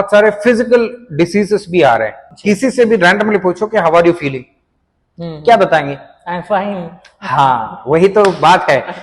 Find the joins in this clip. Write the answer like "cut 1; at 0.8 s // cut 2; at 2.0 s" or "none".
cut 1; at 2.3 s